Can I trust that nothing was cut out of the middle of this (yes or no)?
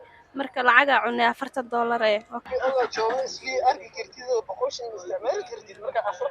no